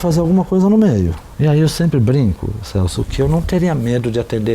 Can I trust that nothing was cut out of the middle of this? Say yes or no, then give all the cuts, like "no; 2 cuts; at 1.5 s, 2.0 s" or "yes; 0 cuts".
no; 1 cut; at 1.2 s